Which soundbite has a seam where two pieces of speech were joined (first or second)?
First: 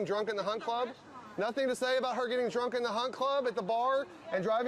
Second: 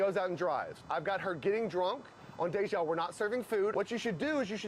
second